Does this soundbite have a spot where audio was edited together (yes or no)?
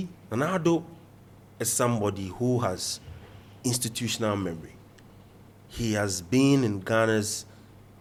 no